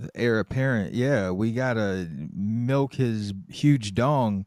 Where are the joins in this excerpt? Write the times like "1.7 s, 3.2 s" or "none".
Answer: none